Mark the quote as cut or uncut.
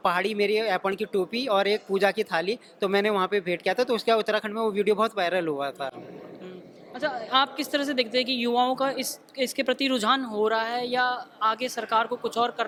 uncut